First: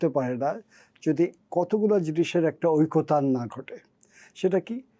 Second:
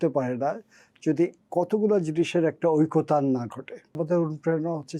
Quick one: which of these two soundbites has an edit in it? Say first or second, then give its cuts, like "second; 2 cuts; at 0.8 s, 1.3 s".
second; 1 cut; at 4.0 s